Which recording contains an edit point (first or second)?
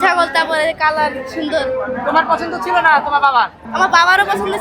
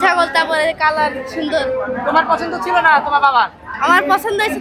first